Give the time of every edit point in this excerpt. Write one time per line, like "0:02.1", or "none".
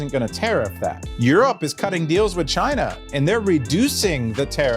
0:01.1